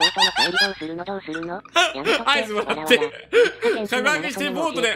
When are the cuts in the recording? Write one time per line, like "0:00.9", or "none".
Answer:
none